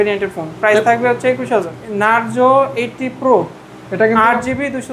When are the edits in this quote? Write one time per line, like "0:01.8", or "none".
0:01.8